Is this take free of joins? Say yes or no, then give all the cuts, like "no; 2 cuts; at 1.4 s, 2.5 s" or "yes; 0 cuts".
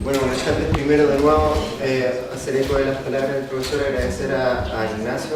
yes; 0 cuts